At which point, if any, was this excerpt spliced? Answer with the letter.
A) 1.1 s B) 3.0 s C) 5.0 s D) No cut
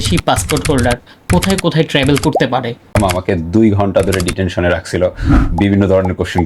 B